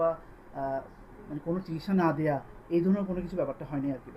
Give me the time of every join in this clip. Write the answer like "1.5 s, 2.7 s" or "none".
none